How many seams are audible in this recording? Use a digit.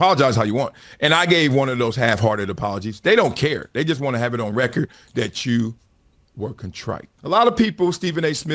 1